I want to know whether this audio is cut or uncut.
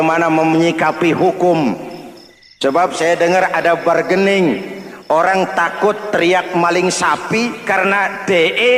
uncut